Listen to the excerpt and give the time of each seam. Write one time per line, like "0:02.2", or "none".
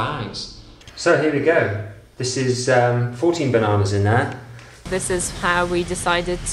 0:00.9
0:04.9